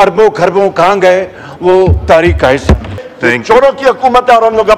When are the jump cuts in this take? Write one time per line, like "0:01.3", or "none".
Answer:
0:02.9